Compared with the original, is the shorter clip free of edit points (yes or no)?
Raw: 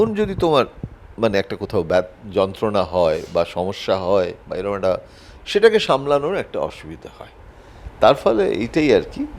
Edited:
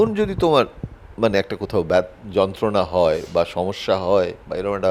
yes